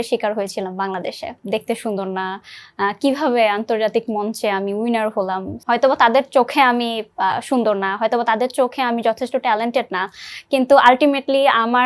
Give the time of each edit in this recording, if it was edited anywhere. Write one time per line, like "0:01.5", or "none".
0:01.4
0:05.5